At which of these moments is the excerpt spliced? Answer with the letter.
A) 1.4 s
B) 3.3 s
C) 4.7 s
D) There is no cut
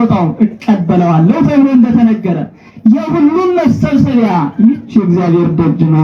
D